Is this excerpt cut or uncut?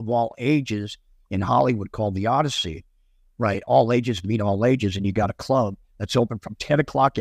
uncut